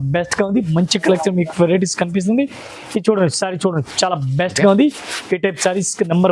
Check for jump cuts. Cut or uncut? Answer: uncut